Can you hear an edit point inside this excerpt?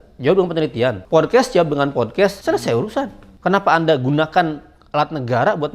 yes; 3 cuts; at 1.0 s, 2.4 s, 3.2 s

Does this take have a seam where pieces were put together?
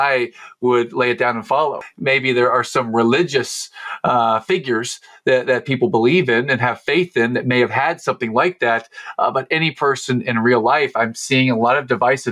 yes; 1 cut; at 1.8 s

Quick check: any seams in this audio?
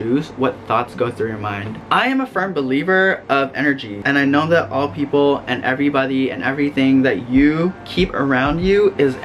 yes; 1 cut; at 1.9 s

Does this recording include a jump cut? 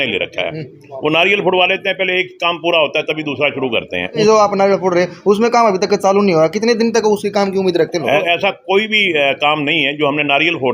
yes; 2 cuts; at 4.2 s, 8.2 s

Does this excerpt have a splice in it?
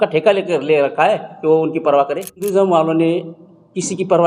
yes; 1 cut; at 2.5 s

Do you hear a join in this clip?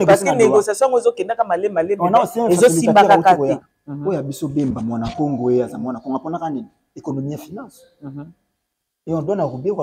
yes; 1 cut; at 3.7 s

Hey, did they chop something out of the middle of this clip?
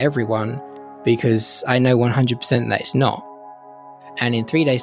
yes; 1 cut; at 3.7 s

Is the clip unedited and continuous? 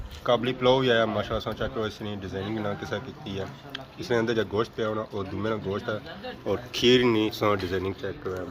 no; 1 cut; at 6.3 s

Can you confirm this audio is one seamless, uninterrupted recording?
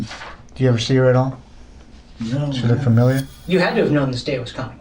no; 1 cut; at 3.3 s

